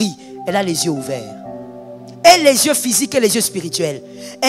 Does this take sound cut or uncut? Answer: uncut